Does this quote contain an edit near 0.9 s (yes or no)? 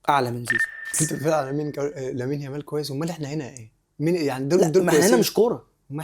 yes